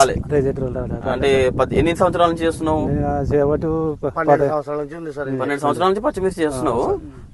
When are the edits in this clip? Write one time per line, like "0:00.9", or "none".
none